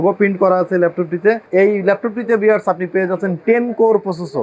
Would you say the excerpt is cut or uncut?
cut